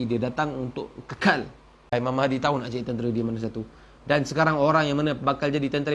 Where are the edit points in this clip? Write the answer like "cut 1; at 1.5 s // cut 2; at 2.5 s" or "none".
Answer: cut 1; at 1.9 s